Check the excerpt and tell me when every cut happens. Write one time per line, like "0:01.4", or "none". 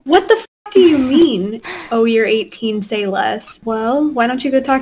0:03.5